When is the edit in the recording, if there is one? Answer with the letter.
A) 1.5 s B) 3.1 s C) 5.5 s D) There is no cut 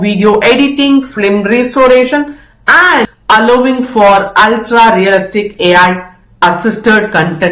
B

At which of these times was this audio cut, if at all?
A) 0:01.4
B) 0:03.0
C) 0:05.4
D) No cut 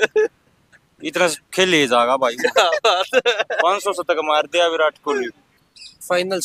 C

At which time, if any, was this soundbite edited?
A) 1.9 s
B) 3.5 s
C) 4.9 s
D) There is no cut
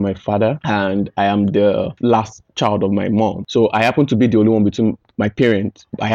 A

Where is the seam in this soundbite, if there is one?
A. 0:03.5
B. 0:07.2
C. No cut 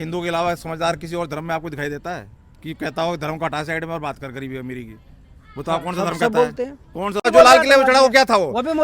B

